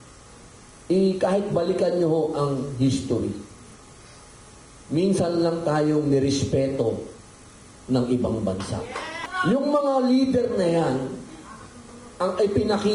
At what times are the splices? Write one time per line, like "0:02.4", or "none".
0:09.2